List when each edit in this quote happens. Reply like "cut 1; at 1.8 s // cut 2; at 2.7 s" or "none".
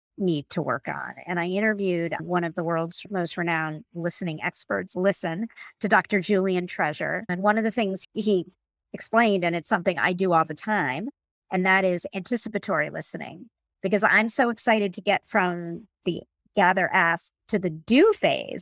cut 1; at 3.0 s // cut 2; at 4.9 s // cut 3; at 7.3 s // cut 4; at 8.1 s